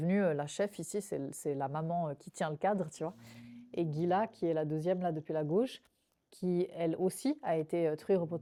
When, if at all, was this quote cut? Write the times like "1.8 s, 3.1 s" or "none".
none

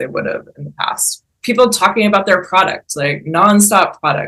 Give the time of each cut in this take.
1.3 s

